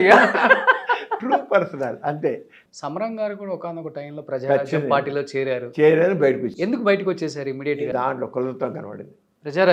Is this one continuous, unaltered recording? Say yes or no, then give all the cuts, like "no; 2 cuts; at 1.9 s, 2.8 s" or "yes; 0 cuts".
no; 2 cuts; at 2.5 s, 7.9 s